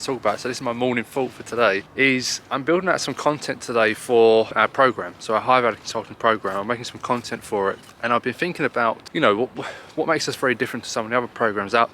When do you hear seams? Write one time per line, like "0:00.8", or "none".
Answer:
0:01.9
0:04.5
0:07.9
0:09.0